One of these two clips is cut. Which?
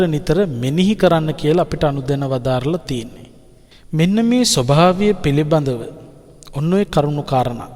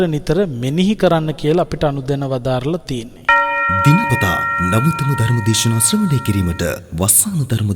second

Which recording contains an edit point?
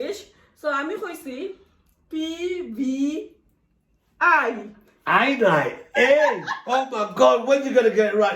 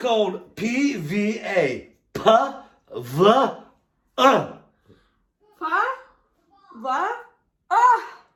first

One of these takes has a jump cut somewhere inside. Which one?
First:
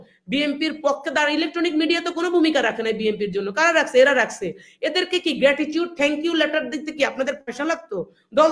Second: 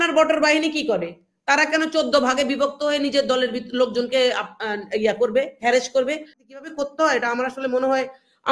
second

